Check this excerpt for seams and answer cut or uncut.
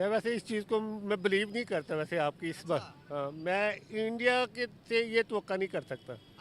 uncut